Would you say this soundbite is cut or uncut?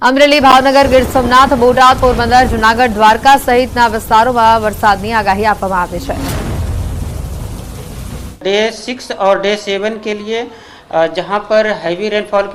uncut